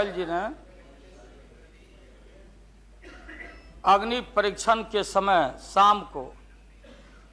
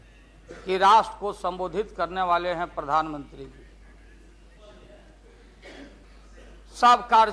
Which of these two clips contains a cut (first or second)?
second